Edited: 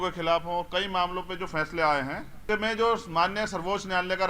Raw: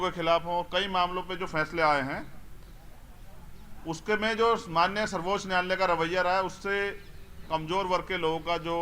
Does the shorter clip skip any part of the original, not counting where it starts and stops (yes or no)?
yes